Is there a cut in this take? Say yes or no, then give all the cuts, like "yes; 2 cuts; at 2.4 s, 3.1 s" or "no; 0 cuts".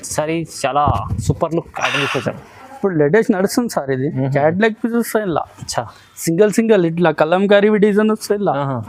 no; 0 cuts